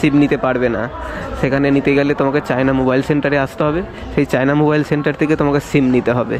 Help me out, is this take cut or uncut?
uncut